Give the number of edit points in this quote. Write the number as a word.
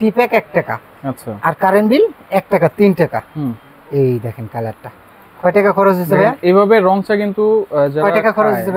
zero